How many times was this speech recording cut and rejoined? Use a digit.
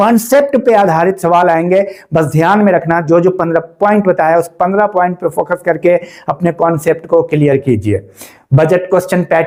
0